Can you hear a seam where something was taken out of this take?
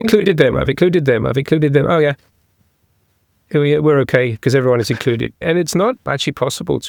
no; 0 cuts

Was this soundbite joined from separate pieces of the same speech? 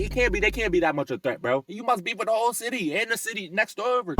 yes; 1 cut; at 1.7 s

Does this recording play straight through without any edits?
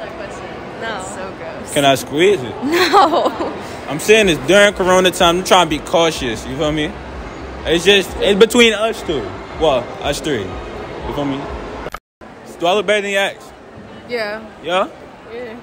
no; 1 cut; at 12.0 s

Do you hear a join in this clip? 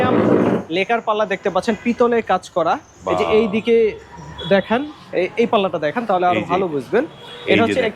no; 0 cuts

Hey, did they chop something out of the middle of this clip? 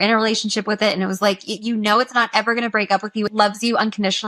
yes; 1 cut; at 3.3 s

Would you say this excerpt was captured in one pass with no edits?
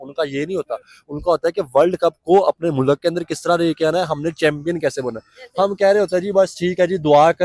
yes; 0 cuts

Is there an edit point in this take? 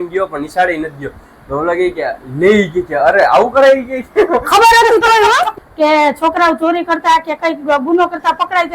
yes; 1 cut; at 5.5 s

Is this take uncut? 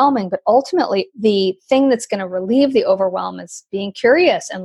no; 1 cut; at 1.1 s

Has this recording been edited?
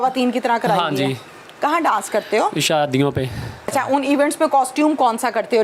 yes; 1 cut; at 3.7 s

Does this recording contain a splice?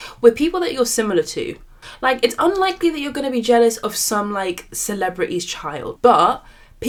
no; 0 cuts

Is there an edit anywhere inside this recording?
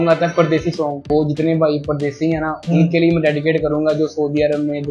yes; 1 cut; at 1.0 s

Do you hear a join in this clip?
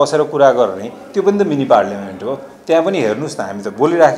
no; 0 cuts

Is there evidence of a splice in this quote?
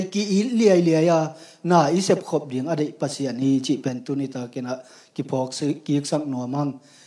no; 0 cuts

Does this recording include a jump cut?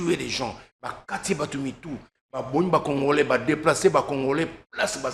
no; 0 cuts

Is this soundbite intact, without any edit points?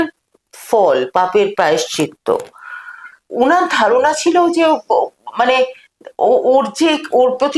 no; 1 cut; at 3.2 s

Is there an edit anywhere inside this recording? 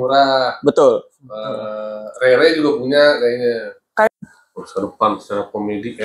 yes; 1 cut; at 4.1 s

